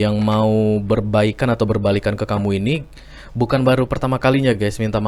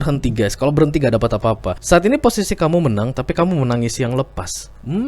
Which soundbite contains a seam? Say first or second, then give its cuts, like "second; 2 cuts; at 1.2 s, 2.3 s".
second; 1 cut; at 1.7 s